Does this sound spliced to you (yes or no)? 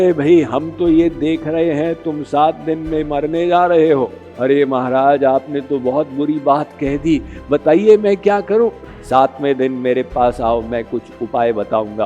yes